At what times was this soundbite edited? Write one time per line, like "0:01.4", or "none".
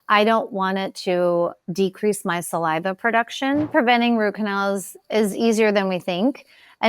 0:03.7